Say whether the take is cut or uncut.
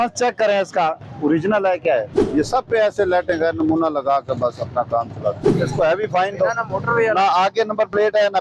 cut